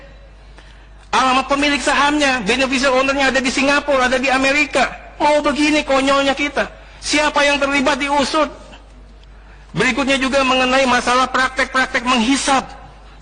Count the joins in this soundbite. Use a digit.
0